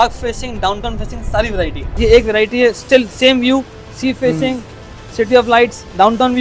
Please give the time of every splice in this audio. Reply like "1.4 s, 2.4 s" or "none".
1.8 s